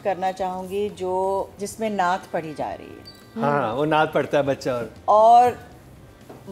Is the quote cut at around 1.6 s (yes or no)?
yes